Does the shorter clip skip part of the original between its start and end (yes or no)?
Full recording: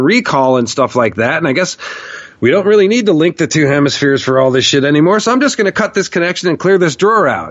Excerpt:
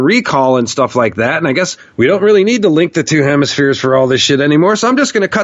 yes